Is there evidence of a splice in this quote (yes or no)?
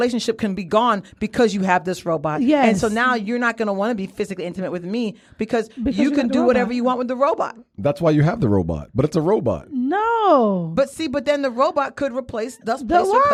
no